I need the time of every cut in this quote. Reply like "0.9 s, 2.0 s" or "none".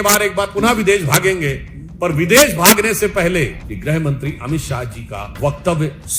3.7 s, 5.2 s